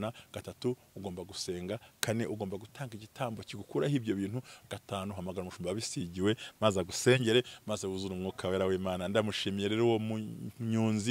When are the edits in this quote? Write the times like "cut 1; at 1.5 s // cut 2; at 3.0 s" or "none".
none

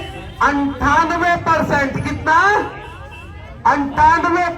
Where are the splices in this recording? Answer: none

